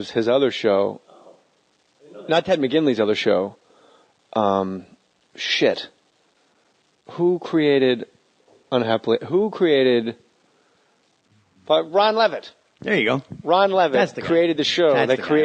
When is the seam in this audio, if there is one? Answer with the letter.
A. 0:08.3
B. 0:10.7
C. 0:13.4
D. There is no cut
B